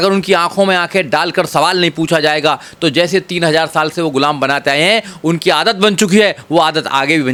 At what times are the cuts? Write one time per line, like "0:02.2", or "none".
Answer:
none